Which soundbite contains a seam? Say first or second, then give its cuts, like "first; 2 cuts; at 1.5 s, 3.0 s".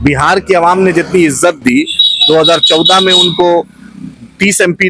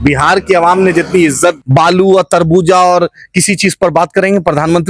second; 1 cut; at 1.6 s